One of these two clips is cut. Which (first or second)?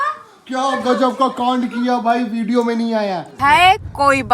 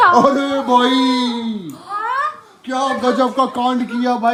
first